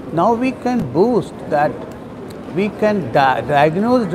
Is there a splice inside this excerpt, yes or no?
no